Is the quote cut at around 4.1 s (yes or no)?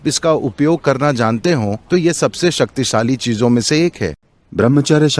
yes